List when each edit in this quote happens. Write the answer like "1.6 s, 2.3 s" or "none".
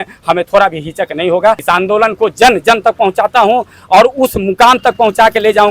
1.6 s